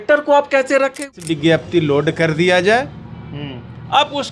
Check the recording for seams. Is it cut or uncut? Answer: cut